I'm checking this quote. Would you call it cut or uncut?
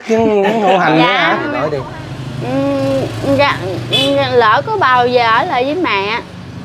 cut